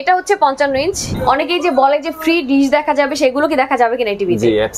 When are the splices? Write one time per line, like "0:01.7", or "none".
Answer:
0:01.0